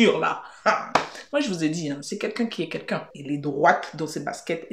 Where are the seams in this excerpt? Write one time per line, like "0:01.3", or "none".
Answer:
none